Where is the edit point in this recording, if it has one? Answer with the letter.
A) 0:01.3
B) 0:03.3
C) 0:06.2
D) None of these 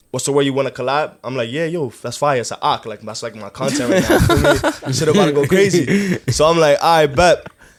D